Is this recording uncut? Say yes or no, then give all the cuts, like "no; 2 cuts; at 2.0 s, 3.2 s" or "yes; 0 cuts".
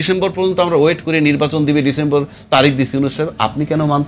yes; 0 cuts